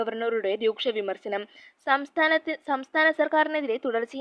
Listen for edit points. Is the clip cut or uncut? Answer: uncut